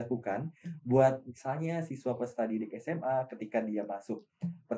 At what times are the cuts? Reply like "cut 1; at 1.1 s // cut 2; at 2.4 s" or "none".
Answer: none